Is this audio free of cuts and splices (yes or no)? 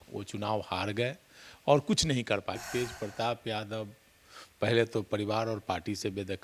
no